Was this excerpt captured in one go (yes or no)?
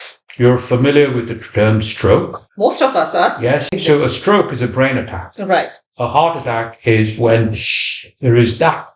no